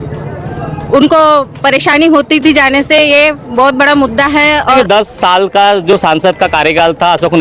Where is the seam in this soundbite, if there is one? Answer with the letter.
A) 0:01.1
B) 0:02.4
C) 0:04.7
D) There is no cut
C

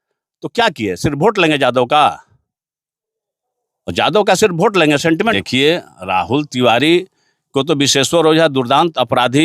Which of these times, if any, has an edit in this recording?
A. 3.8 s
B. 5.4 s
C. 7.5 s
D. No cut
B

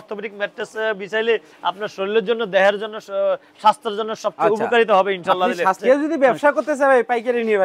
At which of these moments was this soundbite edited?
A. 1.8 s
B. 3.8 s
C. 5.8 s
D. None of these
C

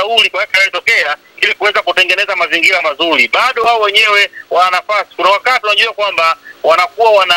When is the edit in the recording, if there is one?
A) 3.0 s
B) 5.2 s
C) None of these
C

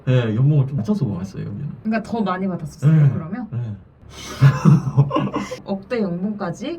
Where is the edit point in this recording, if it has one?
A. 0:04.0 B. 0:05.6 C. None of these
B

